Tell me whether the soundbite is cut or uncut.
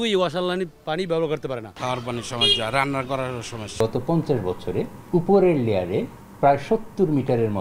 cut